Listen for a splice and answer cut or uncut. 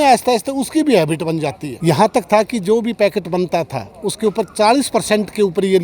cut